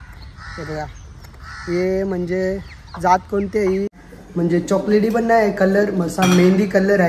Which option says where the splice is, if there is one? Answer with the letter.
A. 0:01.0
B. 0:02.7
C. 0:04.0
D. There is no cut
C